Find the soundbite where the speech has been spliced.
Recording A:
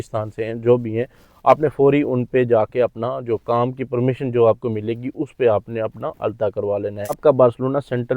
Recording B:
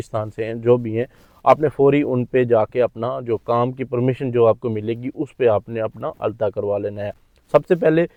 A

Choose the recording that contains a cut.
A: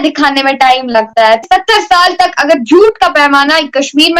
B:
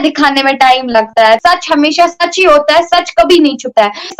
A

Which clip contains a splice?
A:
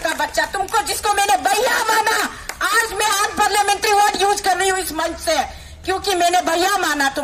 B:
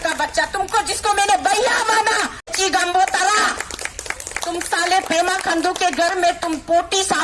B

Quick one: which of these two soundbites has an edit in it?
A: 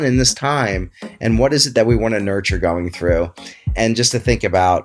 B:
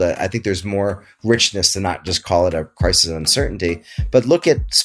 A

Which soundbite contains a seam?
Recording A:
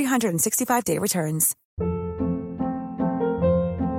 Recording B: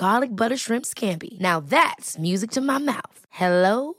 A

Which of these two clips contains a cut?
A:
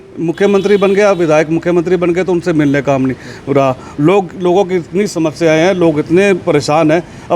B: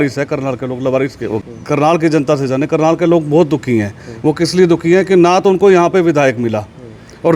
B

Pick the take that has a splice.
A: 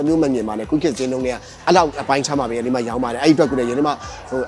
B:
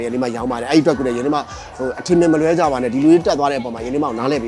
A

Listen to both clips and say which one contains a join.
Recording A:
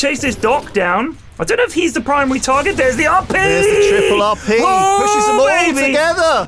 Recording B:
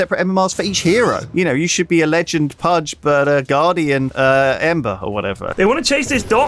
B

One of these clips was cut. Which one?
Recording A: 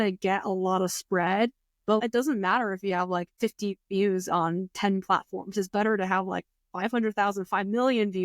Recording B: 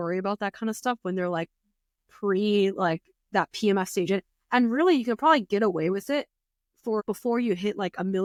A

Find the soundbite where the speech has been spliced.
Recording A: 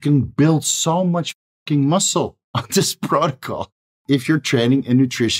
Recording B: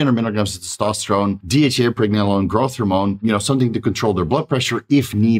B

